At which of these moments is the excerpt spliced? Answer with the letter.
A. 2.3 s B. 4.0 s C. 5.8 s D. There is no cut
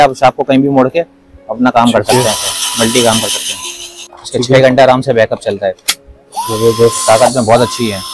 B